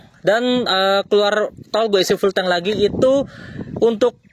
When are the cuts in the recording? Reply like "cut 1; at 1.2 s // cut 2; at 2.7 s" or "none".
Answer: none